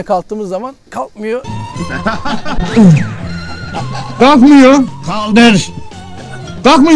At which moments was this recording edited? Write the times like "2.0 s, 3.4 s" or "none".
none

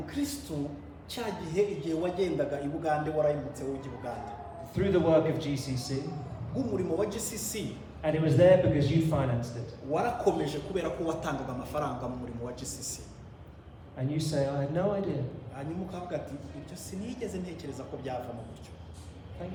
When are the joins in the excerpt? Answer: none

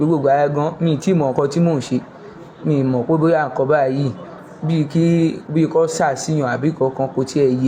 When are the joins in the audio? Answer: none

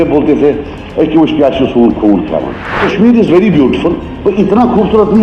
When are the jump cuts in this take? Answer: 2.8 s

